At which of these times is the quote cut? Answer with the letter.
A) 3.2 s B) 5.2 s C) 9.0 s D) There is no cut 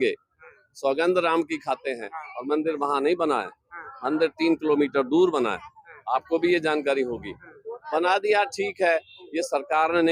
D